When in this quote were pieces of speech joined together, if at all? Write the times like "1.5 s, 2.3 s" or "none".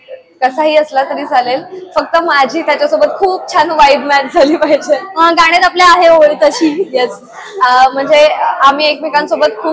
none